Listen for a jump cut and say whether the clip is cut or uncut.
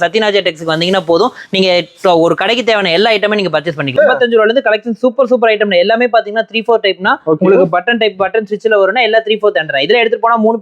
cut